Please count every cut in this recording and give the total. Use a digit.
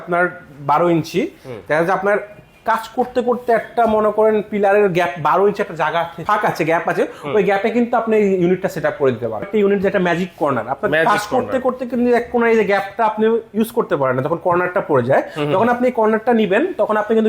1